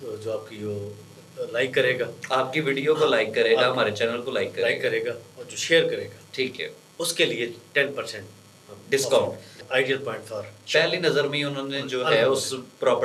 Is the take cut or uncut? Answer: cut